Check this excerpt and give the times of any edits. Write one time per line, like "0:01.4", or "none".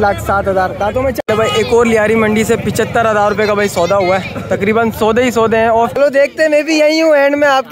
0:01.2
0:05.9